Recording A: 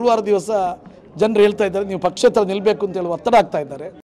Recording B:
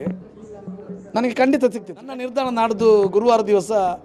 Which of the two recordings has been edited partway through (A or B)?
B